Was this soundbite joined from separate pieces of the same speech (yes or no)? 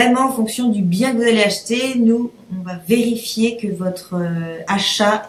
no